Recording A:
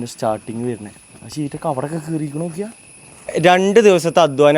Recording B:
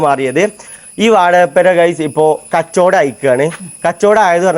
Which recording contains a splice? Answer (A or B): A